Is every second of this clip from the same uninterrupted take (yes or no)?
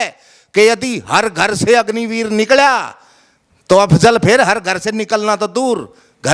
yes